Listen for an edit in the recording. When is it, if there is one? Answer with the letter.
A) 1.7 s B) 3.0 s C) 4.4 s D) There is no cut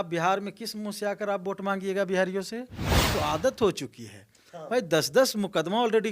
B